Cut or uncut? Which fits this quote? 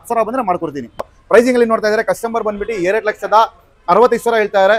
cut